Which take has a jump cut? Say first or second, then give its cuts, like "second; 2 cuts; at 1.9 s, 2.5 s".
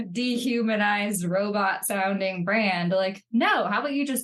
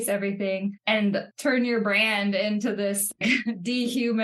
second; 1 cut; at 1.1 s